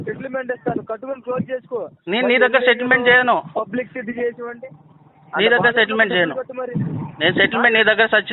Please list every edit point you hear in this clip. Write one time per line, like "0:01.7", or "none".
none